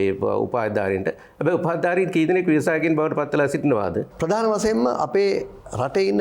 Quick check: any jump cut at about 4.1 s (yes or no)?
yes